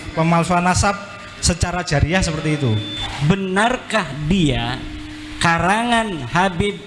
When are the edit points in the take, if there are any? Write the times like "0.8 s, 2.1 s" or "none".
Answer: 3.0 s